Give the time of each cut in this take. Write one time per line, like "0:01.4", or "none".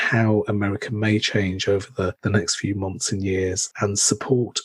none